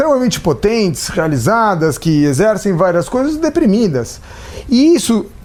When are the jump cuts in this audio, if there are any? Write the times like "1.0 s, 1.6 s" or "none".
none